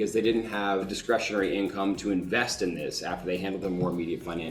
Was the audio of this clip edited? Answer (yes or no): yes